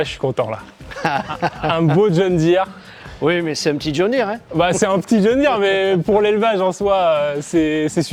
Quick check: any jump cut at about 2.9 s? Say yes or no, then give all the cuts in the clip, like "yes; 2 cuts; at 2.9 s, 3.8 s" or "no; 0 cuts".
no; 0 cuts